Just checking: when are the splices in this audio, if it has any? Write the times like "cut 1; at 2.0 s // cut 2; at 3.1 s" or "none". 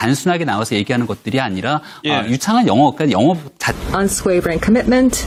none